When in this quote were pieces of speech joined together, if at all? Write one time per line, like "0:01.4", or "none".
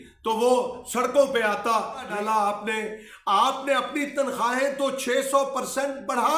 0:02.1